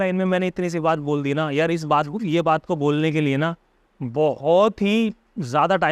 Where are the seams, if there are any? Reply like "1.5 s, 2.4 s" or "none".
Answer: none